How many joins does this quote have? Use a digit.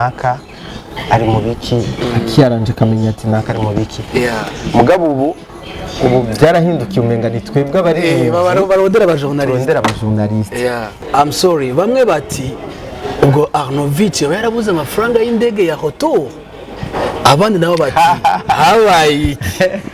1